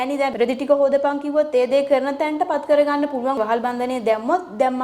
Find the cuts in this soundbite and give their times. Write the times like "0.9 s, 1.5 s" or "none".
3.4 s